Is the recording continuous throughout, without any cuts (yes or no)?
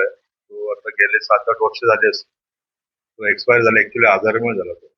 yes